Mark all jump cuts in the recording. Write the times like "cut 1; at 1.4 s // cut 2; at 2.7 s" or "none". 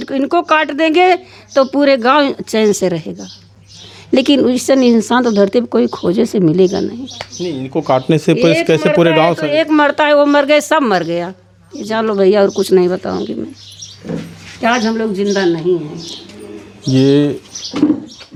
none